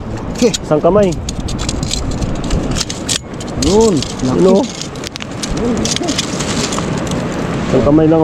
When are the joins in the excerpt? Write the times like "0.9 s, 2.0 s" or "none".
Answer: none